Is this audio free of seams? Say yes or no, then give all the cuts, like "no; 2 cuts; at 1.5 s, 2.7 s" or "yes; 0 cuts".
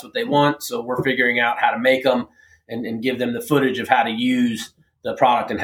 yes; 0 cuts